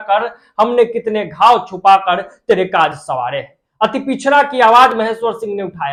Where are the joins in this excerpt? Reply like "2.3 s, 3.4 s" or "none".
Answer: none